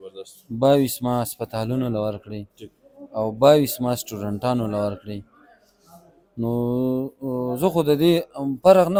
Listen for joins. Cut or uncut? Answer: uncut